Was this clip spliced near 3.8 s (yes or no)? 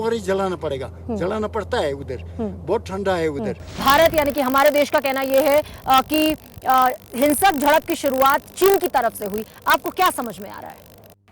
yes